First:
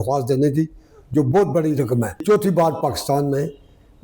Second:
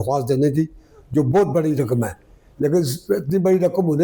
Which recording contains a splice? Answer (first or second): first